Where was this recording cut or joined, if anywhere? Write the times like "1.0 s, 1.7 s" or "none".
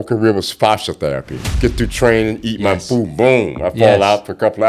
1.4 s